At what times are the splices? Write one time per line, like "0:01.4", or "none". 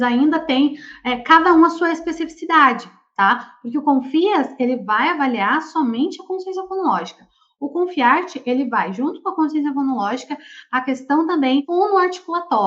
0:11.7